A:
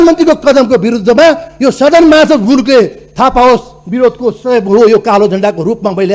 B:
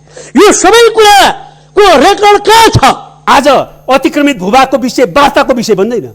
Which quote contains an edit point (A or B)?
B